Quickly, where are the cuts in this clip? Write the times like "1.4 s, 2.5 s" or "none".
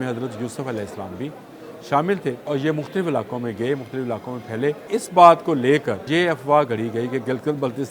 2.5 s, 4.9 s, 6.1 s